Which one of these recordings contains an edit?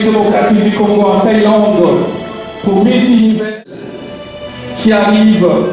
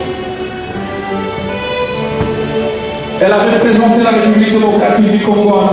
first; 1 cut; at 3.7 s

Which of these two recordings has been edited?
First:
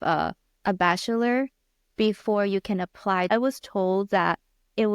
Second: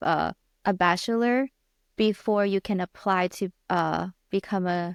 first; 1 cut; at 3.3 s

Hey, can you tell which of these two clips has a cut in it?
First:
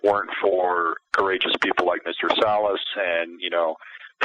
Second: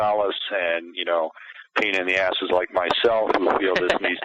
first; 1 cut; at 1.0 s

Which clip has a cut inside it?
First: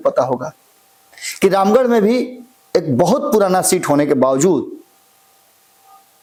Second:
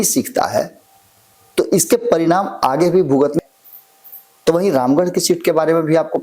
second; 1 cut; at 3.4 s

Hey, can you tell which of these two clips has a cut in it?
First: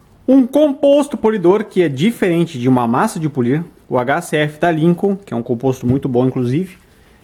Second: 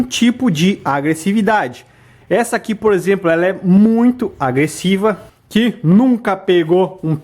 second; 1 cut; at 5.3 s

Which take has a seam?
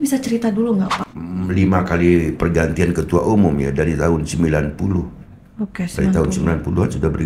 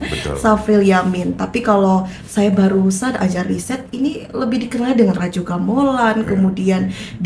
first; 1 cut; at 1.0 s

